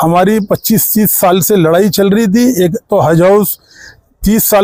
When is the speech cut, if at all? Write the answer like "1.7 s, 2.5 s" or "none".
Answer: none